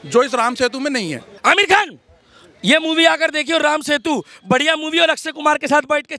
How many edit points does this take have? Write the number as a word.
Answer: one